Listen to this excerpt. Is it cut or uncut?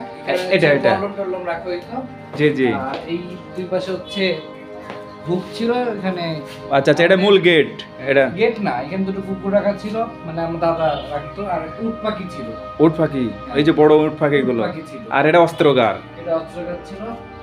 uncut